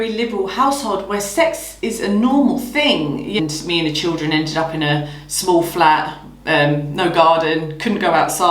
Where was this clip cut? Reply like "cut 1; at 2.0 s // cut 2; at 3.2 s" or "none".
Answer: cut 1; at 3.4 s

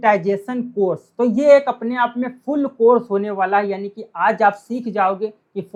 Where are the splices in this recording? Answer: none

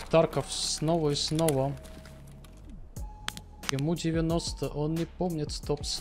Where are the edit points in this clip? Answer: none

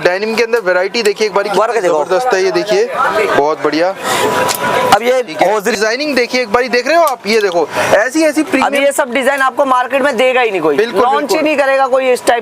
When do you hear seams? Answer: cut 1; at 5.8 s

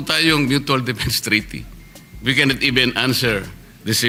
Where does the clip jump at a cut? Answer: none

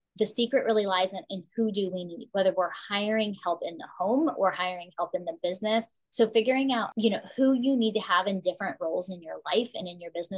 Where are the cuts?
cut 1; at 6.0 s // cut 2; at 6.9 s

